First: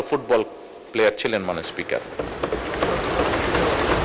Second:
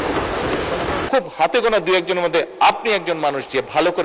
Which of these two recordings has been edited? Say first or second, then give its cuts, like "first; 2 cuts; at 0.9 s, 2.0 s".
second; 1 cut; at 1.0 s